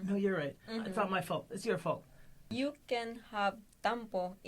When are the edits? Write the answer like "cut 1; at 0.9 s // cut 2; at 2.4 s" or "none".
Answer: cut 1; at 2.5 s